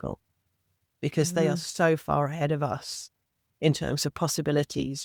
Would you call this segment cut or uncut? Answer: uncut